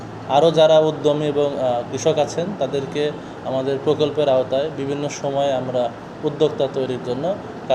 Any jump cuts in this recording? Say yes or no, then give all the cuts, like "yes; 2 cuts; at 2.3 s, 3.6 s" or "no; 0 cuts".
no; 0 cuts